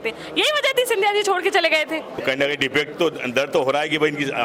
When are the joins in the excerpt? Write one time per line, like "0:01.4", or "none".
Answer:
0:02.1